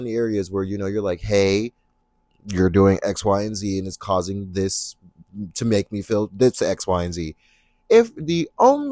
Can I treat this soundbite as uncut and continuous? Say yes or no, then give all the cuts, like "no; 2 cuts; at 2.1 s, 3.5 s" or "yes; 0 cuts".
yes; 0 cuts